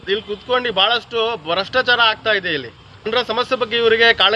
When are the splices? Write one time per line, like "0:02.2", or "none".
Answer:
0:03.1